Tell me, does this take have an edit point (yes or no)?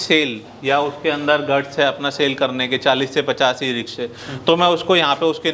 no